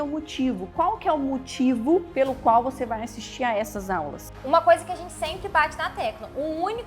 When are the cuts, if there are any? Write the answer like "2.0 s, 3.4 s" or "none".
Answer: 4.3 s